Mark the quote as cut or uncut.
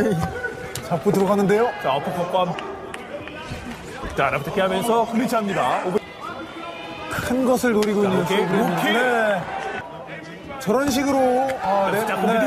cut